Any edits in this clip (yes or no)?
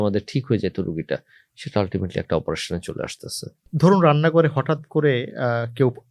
yes